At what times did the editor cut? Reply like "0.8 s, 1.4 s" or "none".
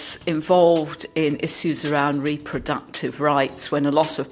none